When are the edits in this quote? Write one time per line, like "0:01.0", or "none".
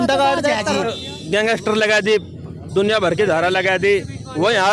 0:01.0